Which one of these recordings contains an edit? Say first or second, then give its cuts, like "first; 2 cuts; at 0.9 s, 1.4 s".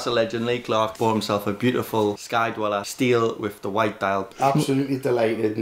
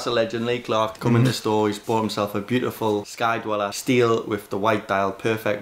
first; 2 cuts; at 0.9 s, 4.3 s